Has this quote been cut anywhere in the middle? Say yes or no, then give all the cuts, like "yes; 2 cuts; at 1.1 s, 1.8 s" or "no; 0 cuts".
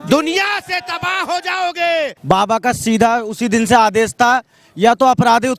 yes; 1 cut; at 2.2 s